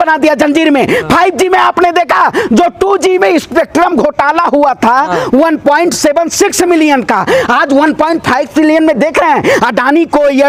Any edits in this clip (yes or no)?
no